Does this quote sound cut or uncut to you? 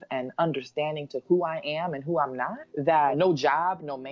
cut